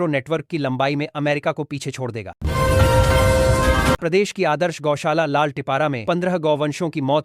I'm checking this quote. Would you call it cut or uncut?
uncut